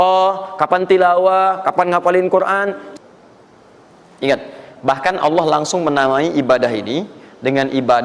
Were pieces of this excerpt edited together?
yes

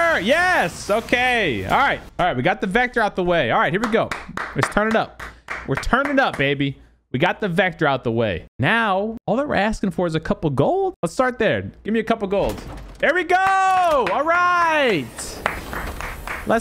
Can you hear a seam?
no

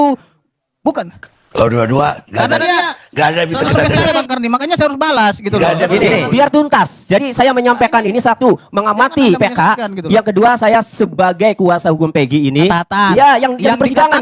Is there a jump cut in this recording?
yes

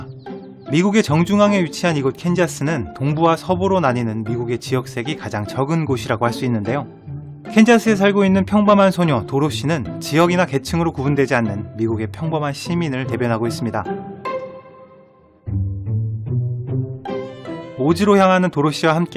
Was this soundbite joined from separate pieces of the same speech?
no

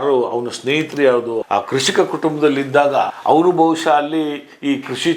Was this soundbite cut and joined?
yes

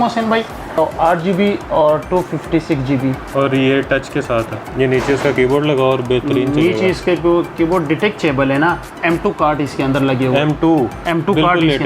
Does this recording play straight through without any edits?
no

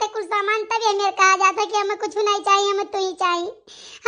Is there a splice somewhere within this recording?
no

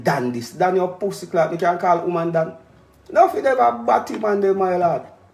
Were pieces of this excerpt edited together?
no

